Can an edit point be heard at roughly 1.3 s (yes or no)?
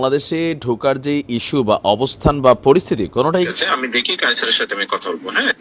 no